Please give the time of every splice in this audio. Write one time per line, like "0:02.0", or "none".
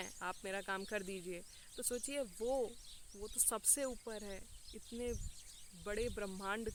none